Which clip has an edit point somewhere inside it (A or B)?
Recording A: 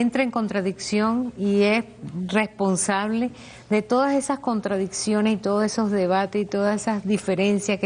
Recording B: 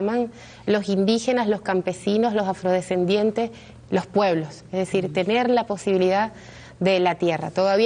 B